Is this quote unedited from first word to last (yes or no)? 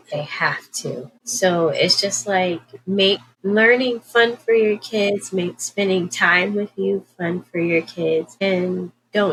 yes